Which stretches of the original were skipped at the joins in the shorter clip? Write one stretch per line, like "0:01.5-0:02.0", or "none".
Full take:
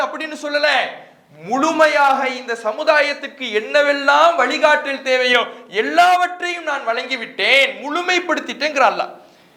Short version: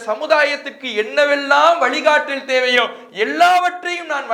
none